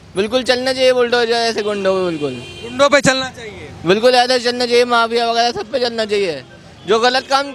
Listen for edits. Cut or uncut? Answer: uncut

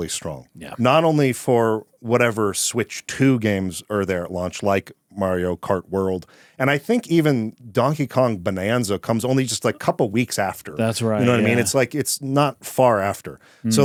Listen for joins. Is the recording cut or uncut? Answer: uncut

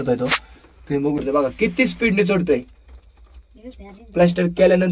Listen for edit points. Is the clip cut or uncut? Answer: cut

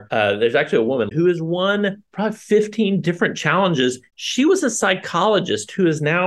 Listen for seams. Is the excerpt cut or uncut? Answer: cut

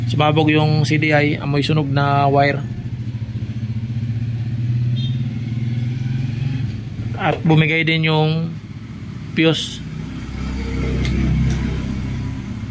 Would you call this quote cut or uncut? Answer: uncut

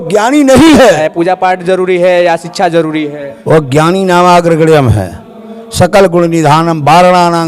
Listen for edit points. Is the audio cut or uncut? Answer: cut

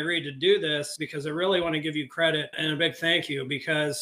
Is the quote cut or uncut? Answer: cut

